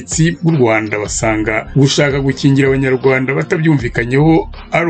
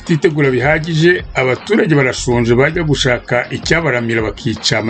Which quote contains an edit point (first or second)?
first